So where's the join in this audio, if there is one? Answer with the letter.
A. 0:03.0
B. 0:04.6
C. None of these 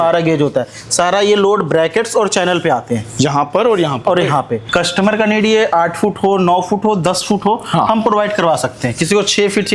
B